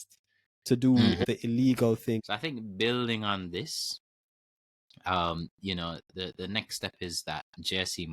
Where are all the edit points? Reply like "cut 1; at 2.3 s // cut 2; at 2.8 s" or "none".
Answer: cut 1; at 1.2 s // cut 2; at 2.2 s